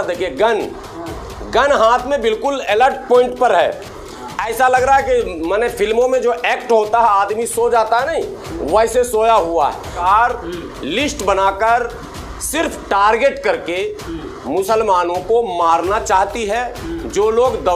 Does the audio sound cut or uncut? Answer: cut